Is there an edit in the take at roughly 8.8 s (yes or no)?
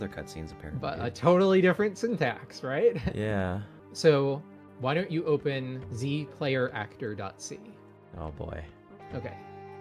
yes